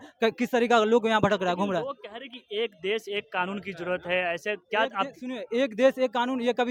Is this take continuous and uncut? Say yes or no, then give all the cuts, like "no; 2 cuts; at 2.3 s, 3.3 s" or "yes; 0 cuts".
yes; 0 cuts